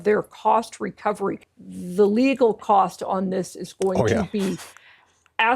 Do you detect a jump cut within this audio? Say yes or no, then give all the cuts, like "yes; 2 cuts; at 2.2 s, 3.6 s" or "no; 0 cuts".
yes; 1 cut; at 1.5 s